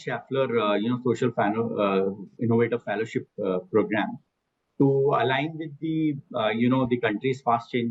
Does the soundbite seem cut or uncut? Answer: uncut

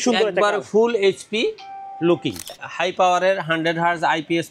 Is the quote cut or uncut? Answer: cut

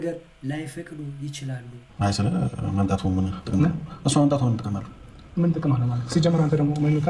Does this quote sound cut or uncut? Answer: uncut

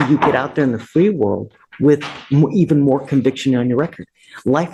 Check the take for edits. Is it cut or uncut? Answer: uncut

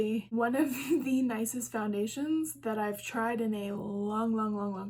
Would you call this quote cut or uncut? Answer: uncut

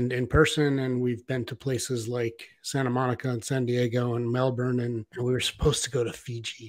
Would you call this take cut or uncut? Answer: cut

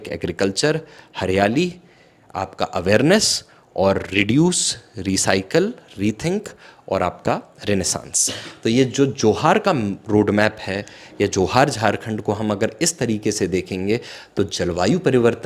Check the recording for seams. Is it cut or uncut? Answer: uncut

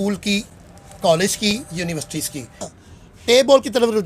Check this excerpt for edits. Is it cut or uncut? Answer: cut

